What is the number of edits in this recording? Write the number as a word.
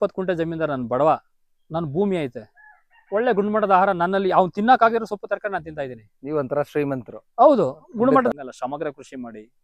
one